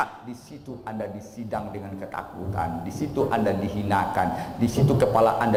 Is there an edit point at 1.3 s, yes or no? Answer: no